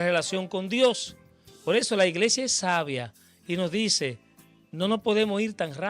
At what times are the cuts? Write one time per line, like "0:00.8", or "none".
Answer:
none